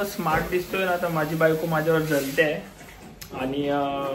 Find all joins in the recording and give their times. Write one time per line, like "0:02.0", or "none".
none